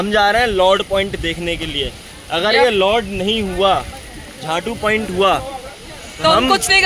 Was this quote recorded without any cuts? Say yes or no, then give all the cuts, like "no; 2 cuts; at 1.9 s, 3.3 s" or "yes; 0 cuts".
yes; 0 cuts